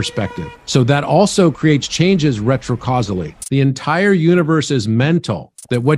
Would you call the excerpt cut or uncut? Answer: cut